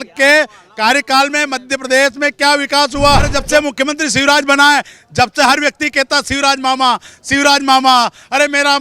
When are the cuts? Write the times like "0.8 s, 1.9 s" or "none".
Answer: 3.4 s